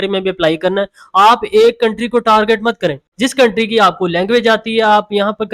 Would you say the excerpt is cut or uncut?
cut